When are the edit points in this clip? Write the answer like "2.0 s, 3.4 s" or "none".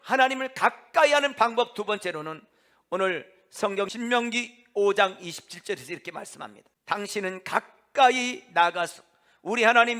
3.9 s, 6.7 s

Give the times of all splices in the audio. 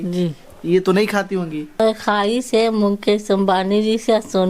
1.8 s

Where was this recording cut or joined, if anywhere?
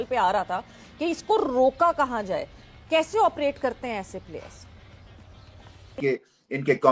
6.0 s

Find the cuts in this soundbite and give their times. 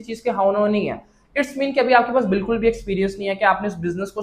none

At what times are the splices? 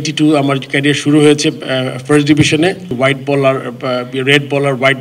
2.9 s

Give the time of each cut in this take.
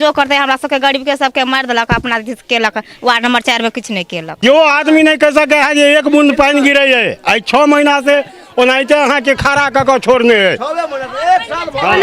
4.3 s

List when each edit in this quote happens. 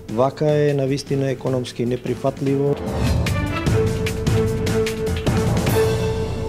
none

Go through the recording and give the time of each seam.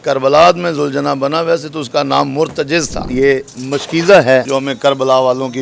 3.0 s, 4.5 s

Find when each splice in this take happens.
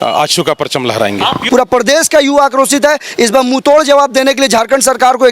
1.4 s

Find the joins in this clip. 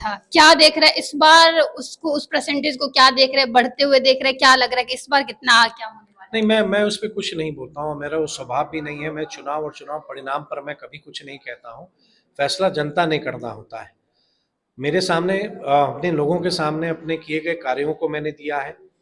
none

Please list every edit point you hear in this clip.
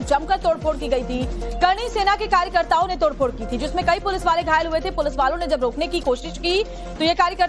none

